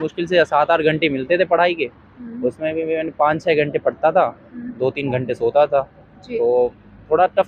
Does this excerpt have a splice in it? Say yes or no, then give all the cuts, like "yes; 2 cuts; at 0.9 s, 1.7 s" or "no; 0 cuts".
no; 0 cuts